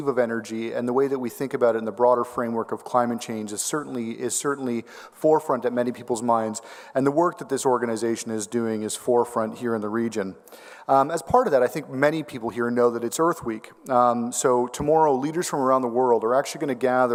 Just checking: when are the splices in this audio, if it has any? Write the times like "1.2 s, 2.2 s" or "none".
none